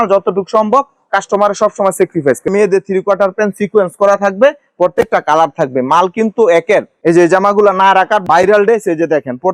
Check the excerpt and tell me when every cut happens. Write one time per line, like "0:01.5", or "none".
0:02.5
0:06.9

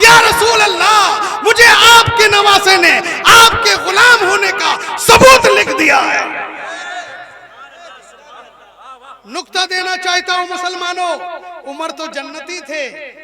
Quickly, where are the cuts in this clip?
none

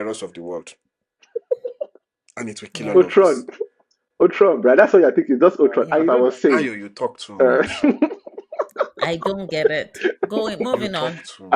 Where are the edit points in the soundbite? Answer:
0:06.0

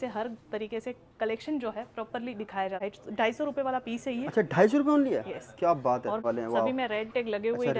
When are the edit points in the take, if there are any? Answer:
0:02.8
0:06.2

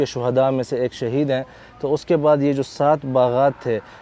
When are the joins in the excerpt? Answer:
none

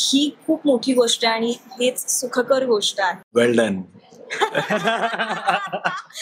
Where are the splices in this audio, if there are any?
0:03.2

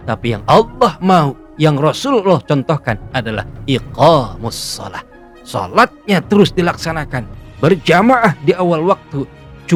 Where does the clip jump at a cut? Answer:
none

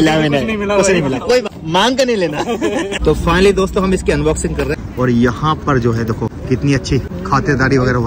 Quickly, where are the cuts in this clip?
0:01.5
0:02.9
0:04.7
0:06.4
0:07.1

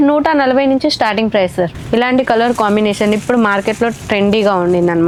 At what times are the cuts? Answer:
none

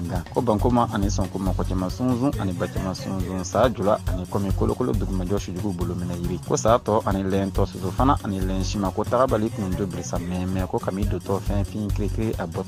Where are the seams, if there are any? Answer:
none

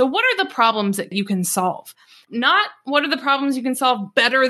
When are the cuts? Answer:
0:01.1

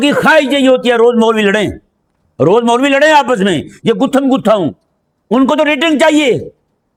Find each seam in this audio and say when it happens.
none

